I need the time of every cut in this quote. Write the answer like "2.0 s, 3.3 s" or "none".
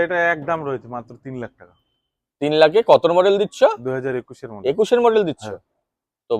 none

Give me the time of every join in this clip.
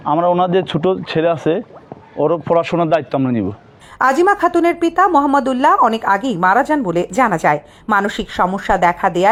none

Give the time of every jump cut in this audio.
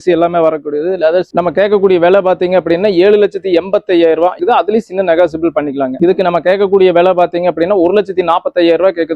6.0 s

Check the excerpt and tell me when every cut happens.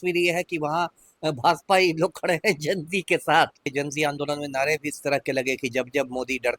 3.7 s

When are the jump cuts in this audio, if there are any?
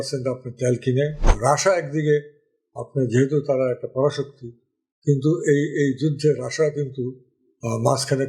1.2 s

